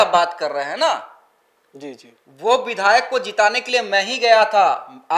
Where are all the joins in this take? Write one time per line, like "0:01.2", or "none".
none